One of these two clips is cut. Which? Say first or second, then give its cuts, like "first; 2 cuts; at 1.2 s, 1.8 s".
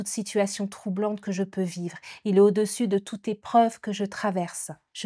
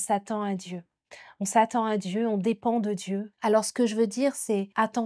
second; 1 cut; at 3.3 s